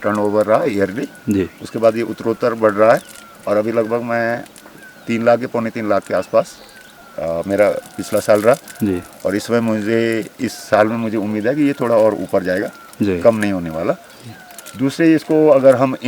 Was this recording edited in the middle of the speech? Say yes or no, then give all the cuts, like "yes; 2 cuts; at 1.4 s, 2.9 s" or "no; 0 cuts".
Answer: no; 0 cuts